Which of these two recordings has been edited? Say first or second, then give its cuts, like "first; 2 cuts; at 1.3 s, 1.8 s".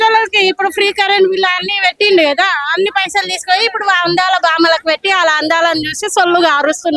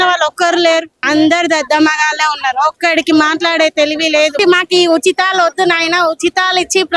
second; 2 cuts; at 0.9 s, 4.4 s